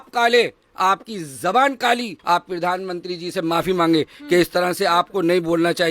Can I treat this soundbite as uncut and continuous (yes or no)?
no